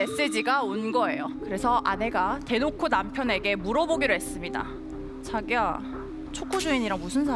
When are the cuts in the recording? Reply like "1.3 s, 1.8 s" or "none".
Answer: 1.4 s